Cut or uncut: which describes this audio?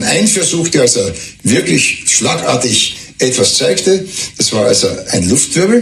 uncut